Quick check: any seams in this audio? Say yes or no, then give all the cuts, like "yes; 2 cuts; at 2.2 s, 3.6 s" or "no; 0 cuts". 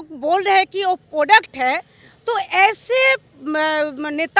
no; 0 cuts